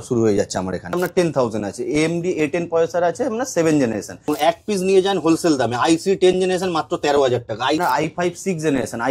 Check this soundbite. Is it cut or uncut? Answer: cut